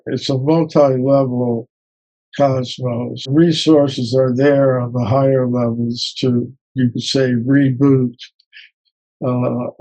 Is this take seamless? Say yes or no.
no